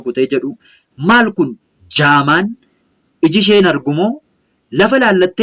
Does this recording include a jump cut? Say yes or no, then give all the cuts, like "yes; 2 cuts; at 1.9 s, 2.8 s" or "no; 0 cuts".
no; 0 cuts